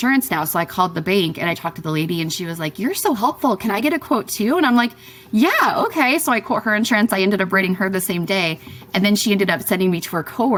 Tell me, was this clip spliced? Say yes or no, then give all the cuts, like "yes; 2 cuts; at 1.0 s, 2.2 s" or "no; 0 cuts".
no; 0 cuts